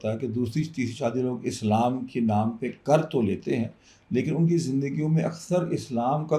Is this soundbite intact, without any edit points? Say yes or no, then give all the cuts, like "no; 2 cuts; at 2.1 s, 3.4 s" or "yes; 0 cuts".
yes; 0 cuts